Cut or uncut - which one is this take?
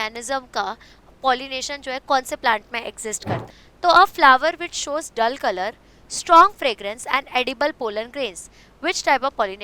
cut